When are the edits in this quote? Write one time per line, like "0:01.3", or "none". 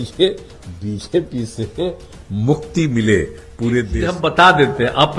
0:04.1